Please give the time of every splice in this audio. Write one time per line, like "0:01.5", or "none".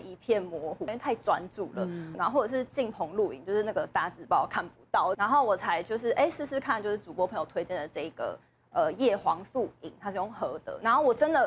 0:00.9
0:02.1
0:05.1